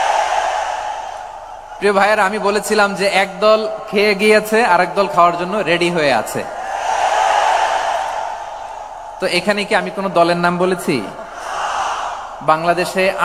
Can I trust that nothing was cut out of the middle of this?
yes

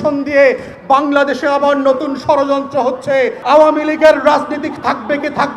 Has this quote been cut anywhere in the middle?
yes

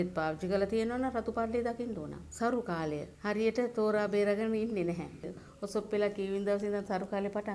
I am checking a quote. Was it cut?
yes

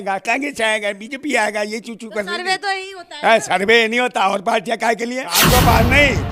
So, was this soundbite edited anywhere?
yes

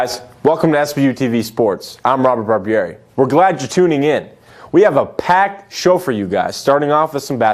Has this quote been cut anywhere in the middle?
no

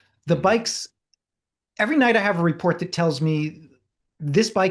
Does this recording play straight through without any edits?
yes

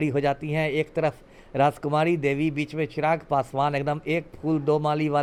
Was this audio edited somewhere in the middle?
no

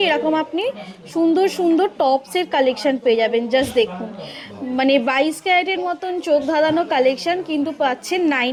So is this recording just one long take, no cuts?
yes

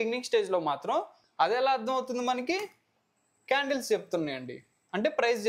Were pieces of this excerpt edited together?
yes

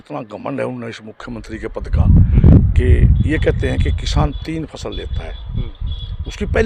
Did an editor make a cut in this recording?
no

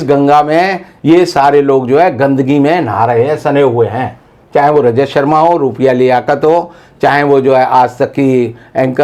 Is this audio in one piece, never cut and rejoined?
yes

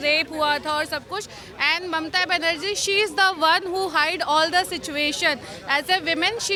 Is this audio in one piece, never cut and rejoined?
yes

